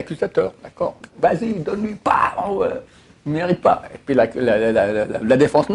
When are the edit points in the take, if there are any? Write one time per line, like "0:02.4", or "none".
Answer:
0:01.0

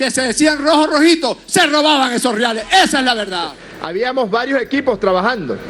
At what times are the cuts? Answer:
0:03.7

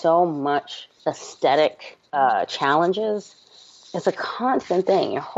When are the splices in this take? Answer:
0:02.1

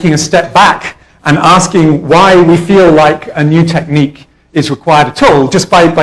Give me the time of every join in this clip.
0:01.7

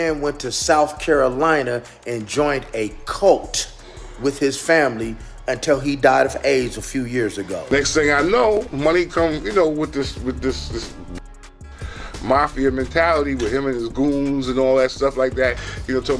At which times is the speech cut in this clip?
0:07.2

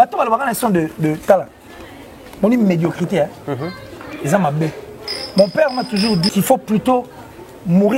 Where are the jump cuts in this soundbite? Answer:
0:06.3

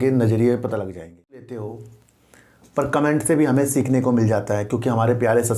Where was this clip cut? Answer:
0:01.6

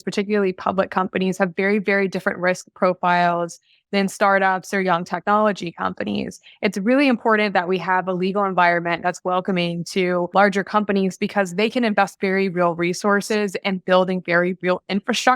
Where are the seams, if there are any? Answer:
0:10.3

